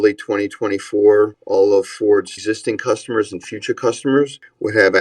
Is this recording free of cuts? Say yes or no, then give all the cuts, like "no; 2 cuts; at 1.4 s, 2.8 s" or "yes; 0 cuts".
no; 2 cuts; at 1.4 s, 2.3 s